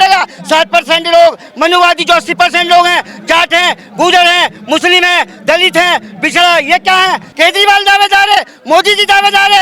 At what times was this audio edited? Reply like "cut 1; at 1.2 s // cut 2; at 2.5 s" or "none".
cut 1; at 7.3 s